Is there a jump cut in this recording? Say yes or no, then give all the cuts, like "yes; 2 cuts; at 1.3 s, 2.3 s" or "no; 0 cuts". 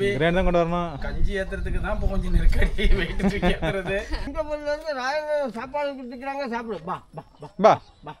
yes; 1 cut; at 4.2 s